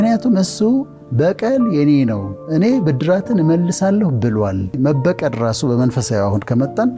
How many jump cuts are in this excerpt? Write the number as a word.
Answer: one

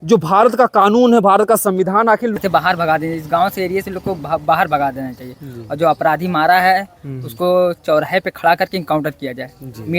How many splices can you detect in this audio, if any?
one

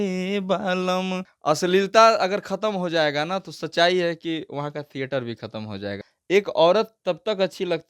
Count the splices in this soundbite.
two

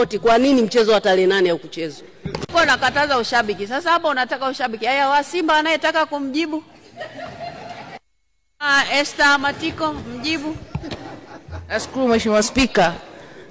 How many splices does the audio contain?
one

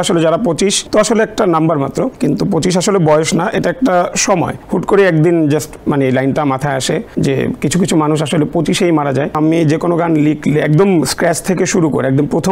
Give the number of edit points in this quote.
five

